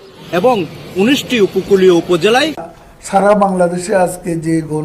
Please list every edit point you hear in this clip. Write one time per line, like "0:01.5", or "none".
0:02.7